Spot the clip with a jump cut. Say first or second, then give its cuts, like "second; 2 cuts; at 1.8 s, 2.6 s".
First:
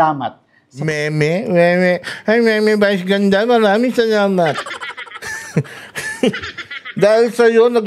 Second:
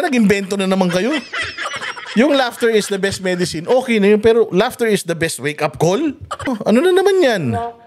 second; 1 cut; at 6.5 s